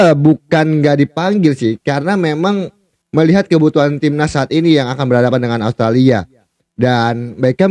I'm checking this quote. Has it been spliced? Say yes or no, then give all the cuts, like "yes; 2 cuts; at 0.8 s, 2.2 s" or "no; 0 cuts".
no; 0 cuts